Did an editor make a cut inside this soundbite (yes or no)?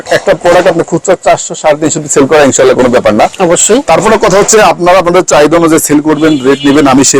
no